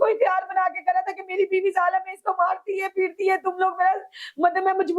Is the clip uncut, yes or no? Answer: yes